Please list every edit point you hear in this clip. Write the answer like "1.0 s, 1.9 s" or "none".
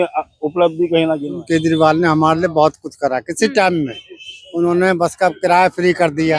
1.3 s